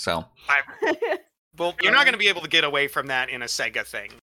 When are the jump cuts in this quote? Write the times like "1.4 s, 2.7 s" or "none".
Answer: 1.8 s